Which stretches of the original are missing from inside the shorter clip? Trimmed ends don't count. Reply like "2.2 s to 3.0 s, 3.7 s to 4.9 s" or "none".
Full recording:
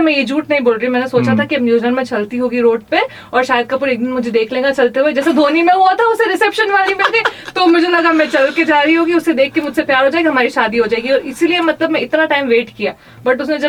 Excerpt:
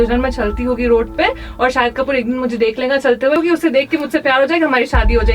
5.1 s to 9.0 s